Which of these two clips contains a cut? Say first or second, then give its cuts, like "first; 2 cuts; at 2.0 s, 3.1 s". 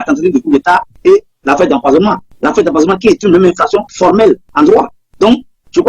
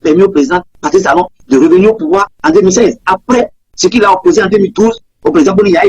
second; 2 cuts; at 1.1 s, 2.3 s